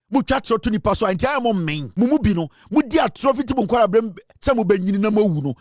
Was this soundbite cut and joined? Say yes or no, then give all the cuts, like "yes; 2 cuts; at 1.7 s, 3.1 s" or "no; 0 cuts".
yes; 1 cut; at 1.8 s